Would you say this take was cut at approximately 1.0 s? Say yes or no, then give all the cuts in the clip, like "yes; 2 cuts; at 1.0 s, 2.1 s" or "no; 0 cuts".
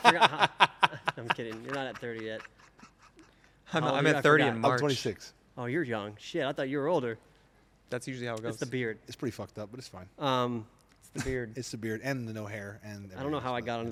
no; 0 cuts